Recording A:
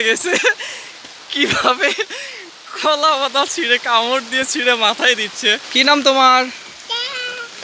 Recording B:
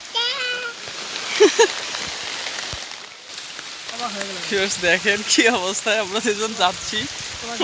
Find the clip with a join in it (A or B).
A